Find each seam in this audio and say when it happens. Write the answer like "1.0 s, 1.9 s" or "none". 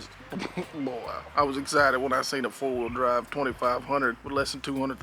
1.2 s